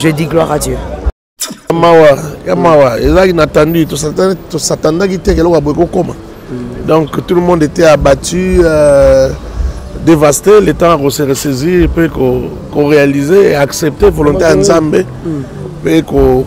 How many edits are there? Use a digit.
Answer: 1